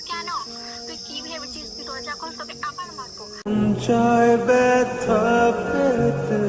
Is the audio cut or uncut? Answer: uncut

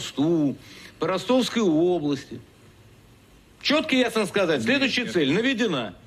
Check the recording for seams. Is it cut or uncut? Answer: uncut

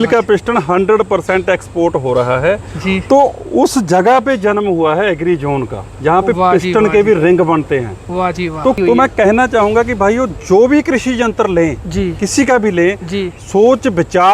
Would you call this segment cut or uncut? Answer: cut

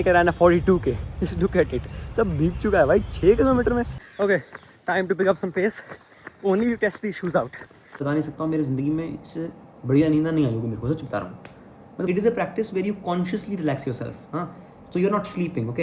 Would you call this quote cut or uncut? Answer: cut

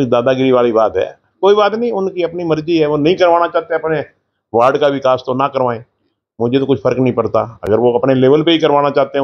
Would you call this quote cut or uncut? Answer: uncut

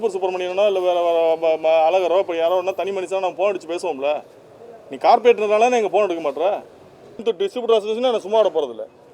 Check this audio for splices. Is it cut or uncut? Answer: cut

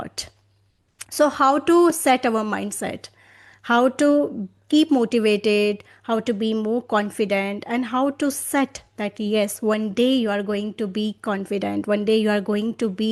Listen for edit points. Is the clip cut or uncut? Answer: uncut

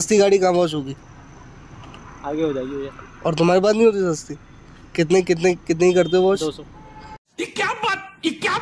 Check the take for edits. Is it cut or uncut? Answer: uncut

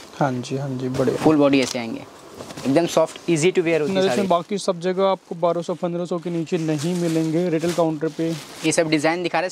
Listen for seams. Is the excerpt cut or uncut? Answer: cut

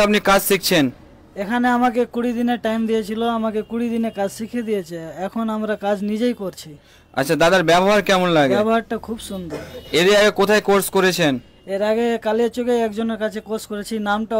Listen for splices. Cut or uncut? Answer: uncut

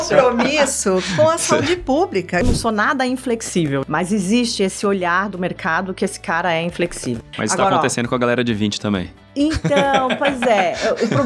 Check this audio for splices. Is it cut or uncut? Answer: cut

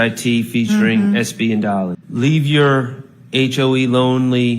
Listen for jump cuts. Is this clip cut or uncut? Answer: cut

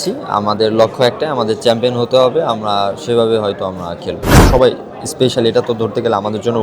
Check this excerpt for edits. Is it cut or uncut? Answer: cut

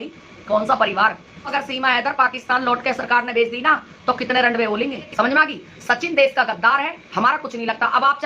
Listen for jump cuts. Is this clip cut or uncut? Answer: cut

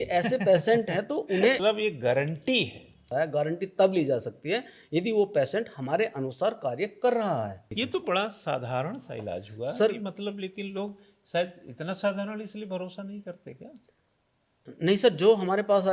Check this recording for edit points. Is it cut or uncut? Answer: cut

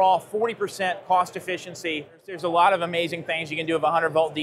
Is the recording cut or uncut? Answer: cut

